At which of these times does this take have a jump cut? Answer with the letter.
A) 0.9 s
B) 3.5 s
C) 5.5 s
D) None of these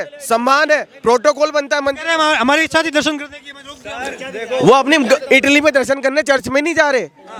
D